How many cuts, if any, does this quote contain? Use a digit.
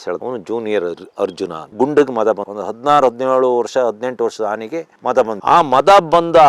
1